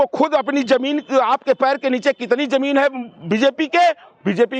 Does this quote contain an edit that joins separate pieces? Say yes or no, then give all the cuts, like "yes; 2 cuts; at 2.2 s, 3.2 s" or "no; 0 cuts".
no; 0 cuts